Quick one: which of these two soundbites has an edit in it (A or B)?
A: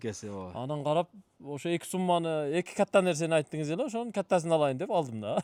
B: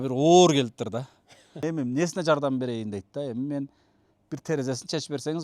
B